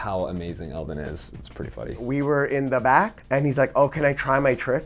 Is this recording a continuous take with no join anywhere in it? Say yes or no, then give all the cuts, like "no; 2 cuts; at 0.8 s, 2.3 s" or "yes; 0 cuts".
no; 2 cuts; at 2.0 s, 3.2 s